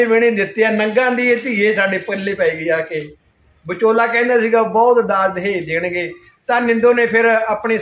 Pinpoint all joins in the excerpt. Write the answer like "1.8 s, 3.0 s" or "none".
none